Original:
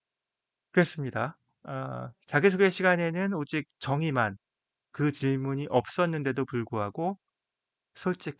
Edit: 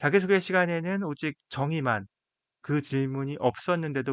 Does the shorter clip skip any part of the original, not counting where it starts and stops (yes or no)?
no